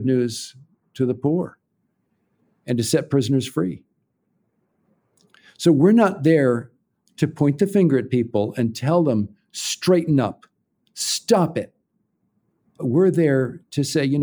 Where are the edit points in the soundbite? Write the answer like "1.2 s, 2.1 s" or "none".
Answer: 12.8 s